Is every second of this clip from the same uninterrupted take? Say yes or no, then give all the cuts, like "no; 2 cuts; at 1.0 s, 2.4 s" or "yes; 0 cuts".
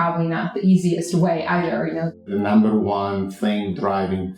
no; 1 cut; at 2.3 s